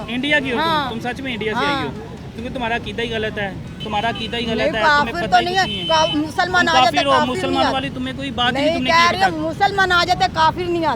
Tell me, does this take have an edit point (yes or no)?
no